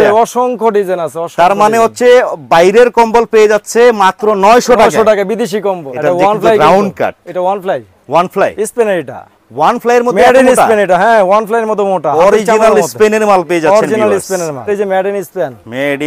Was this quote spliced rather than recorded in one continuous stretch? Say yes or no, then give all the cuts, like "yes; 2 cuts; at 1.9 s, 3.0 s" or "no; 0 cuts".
yes; 2 cuts; at 5.9 s, 14.7 s